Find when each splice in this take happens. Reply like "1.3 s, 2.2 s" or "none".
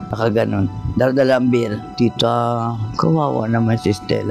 1.9 s